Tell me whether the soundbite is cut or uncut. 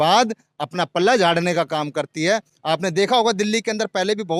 uncut